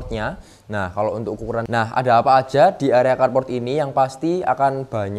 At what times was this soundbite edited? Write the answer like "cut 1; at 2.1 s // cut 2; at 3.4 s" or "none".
cut 1; at 1.7 s